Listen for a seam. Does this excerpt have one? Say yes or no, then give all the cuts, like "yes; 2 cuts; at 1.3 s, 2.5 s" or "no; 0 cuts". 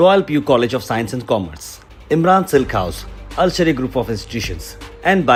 no; 0 cuts